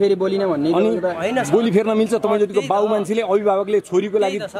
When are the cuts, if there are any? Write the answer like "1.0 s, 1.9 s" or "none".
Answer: none